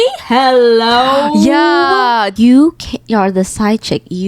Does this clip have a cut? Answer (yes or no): yes